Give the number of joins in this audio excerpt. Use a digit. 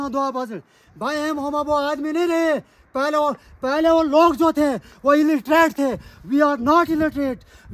0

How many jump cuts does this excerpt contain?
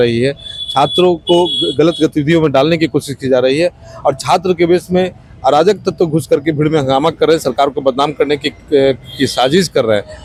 0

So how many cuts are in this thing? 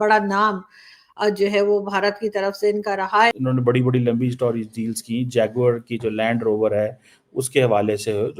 1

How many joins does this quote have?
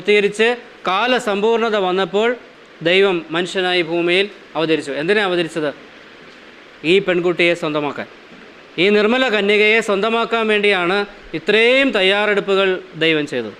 0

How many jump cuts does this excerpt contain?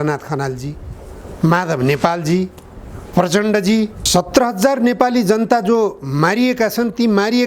1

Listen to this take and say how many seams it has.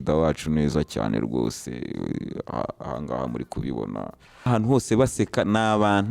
1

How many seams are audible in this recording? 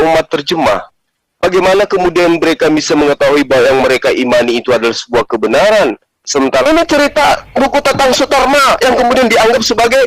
1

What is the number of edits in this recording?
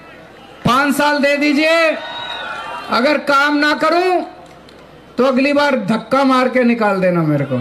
0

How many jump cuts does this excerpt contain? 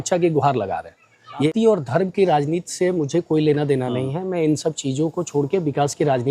1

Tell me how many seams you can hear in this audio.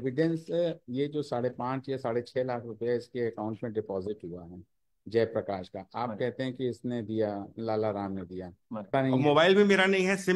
1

